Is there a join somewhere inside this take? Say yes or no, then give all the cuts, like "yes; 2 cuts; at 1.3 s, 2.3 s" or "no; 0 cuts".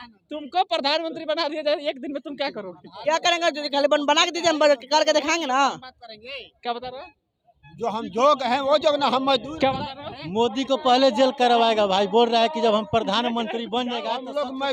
no; 0 cuts